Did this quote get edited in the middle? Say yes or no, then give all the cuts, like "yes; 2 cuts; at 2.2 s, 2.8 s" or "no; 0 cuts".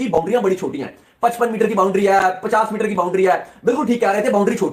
no; 0 cuts